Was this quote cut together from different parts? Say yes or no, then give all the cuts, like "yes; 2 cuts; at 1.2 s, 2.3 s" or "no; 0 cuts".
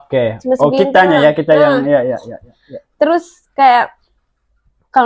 no; 0 cuts